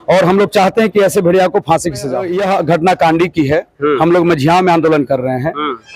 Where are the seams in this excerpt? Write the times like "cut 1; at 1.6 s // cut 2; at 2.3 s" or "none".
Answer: cut 1; at 2.3 s